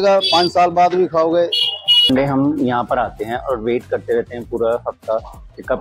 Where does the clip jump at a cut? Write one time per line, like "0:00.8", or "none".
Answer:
0:02.1